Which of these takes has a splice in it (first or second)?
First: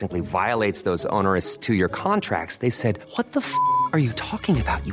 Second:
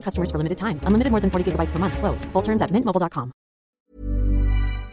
second